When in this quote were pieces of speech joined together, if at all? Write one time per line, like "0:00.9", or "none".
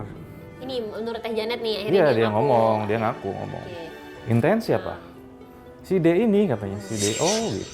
0:04.1